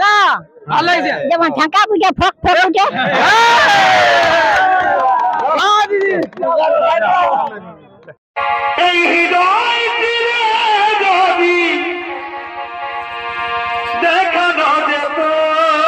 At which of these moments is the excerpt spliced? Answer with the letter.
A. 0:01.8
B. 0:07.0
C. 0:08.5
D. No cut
D